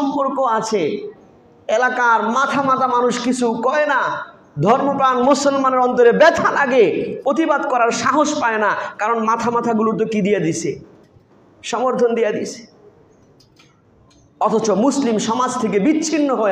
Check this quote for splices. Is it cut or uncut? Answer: uncut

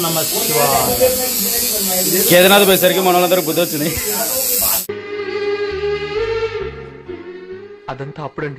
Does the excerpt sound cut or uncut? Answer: cut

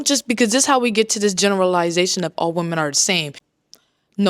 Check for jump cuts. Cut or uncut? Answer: cut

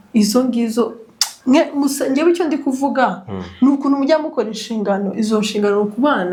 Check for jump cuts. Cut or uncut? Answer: uncut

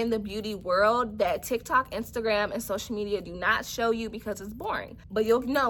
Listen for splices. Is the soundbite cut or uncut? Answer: uncut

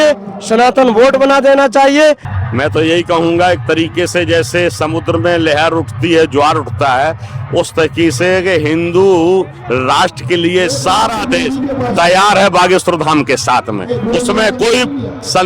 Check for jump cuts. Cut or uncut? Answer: cut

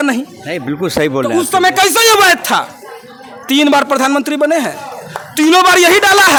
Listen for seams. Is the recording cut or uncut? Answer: uncut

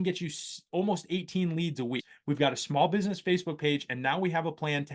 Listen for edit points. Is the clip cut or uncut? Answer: cut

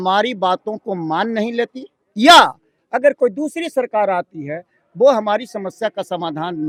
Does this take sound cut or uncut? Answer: uncut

